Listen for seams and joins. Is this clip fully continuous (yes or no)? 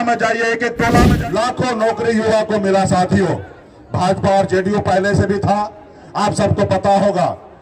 no